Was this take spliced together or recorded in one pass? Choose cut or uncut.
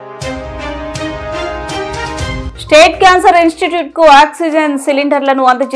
cut